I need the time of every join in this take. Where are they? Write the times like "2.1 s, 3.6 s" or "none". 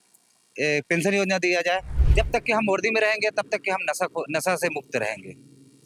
2.0 s